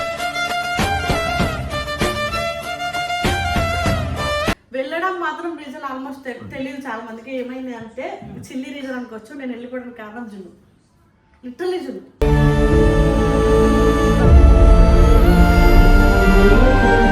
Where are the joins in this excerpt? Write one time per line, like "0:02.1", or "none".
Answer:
0:04.6